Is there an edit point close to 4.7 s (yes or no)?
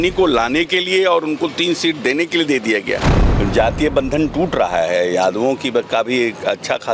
no